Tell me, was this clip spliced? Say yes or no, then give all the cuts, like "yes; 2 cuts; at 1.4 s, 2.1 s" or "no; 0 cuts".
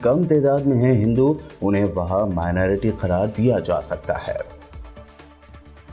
no; 0 cuts